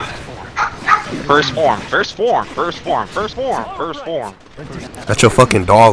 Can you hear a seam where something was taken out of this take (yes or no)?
no